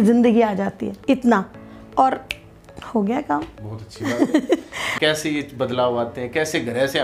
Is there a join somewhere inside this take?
yes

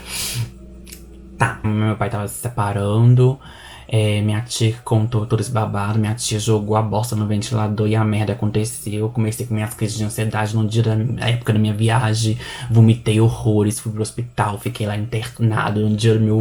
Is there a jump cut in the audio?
yes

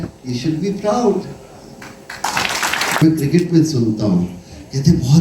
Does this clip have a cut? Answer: yes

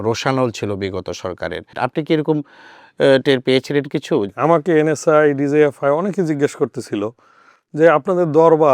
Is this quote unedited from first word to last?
no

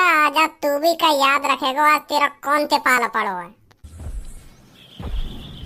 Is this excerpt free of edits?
yes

